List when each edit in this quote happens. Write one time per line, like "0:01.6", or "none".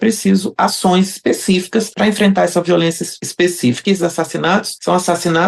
0:03.6

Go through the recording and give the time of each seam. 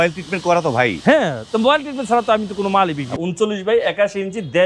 0:03.1

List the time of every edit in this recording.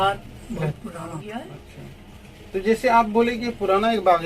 0:01.1

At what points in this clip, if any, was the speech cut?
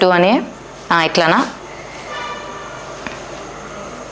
0:01.6

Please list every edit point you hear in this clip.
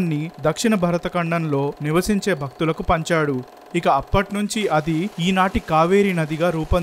none

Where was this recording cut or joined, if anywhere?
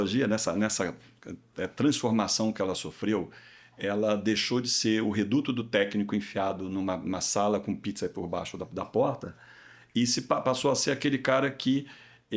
none

